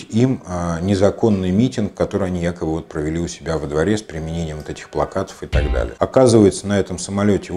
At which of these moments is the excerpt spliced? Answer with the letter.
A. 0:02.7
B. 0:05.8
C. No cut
B